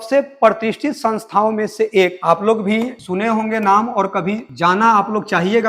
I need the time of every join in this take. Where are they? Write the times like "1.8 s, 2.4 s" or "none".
2.2 s

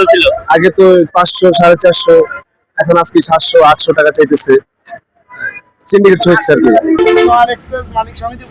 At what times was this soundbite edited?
7.0 s

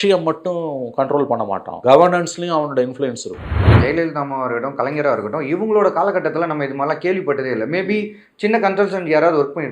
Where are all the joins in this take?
1.7 s, 3.7 s

